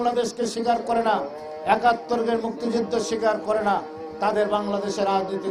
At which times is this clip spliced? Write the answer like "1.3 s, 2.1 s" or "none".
none